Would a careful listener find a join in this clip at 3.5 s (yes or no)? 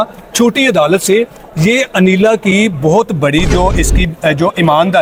no